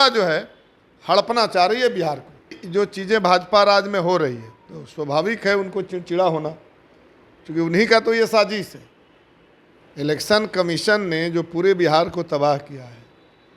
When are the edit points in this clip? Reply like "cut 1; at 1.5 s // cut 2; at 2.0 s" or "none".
cut 1; at 2.6 s